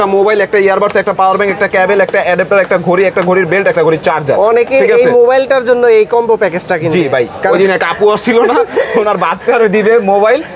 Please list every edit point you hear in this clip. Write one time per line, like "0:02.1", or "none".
none